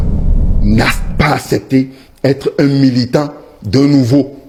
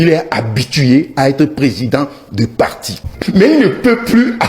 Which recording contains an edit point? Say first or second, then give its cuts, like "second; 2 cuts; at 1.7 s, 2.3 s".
second; 1 cut; at 3.1 s